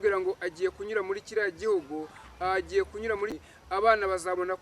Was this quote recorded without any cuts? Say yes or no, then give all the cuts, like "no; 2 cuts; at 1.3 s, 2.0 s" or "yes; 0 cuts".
no; 1 cut; at 3.4 s